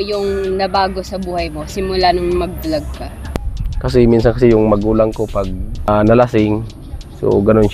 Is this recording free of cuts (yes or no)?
no